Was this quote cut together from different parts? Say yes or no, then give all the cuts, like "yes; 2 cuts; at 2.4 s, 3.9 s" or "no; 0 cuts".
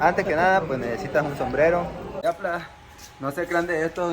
yes; 1 cut; at 2.1 s